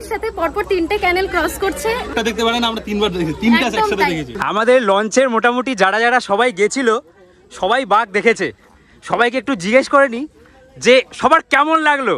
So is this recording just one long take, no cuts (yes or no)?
no